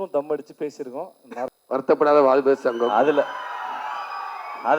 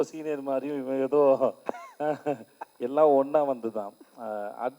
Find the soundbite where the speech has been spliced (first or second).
first